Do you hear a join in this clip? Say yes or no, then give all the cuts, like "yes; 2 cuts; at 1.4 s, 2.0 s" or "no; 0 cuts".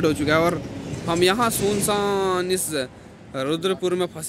no; 0 cuts